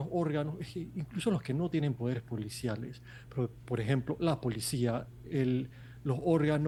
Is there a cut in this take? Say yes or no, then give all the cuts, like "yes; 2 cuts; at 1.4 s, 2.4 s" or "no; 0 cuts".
no; 0 cuts